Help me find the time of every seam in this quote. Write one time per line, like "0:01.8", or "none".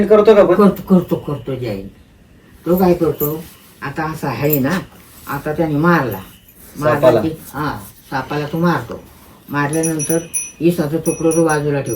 none